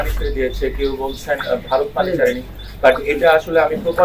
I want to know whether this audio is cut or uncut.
uncut